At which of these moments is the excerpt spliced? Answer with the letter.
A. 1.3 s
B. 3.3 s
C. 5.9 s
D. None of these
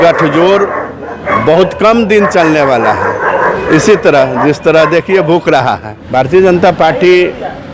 C